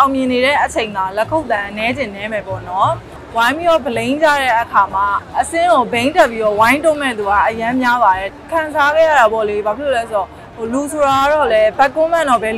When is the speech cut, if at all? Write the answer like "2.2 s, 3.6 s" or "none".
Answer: 3.1 s, 5.2 s, 8.3 s